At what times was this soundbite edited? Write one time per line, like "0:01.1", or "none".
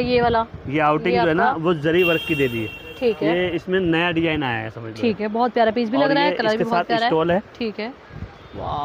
none